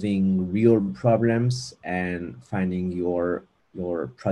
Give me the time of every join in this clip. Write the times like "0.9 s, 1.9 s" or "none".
none